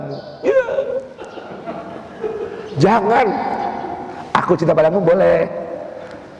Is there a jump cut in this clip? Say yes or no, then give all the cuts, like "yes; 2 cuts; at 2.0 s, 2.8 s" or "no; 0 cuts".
no; 0 cuts